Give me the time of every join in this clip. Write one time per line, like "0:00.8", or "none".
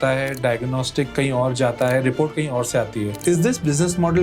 0:03.2

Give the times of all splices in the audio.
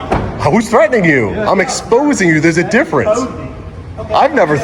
none

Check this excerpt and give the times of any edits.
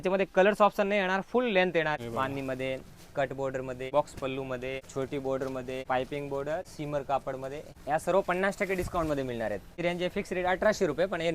0:02.0
0:03.8
0:04.8
0:05.8
0:06.7
0:07.7
0:09.7

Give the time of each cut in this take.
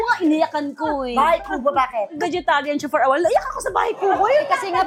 none

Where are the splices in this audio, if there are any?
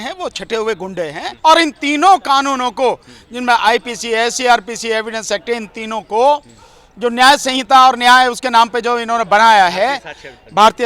0:01.2

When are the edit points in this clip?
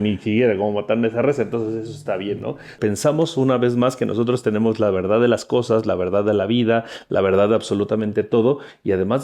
0:02.8

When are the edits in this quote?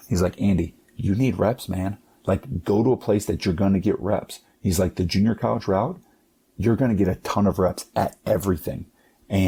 none

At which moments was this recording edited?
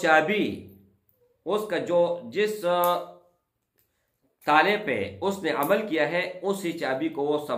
none

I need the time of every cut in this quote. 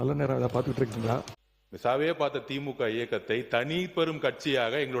0:01.4

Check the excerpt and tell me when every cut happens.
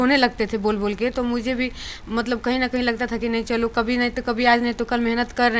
none

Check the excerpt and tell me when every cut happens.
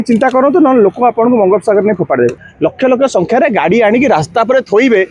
0:02.5

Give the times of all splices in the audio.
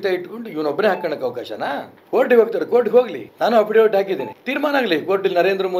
0:01.9
0:03.2
0:04.4

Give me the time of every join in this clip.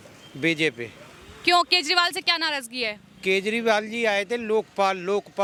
none

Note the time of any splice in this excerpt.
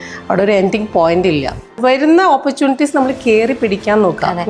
0:01.8

